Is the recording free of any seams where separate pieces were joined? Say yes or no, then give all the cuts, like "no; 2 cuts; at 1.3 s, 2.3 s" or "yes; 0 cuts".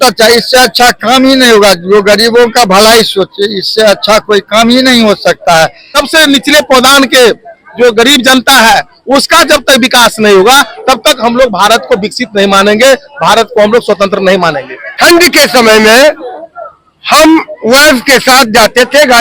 no; 2 cuts; at 5.9 s, 14.8 s